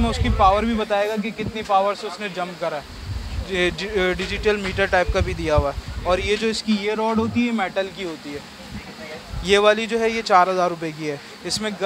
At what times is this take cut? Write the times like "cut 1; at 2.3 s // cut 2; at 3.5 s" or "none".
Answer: none